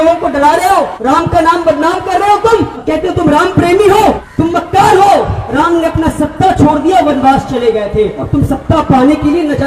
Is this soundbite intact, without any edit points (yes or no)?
no